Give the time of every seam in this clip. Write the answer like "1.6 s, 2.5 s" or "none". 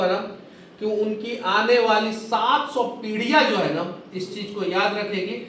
none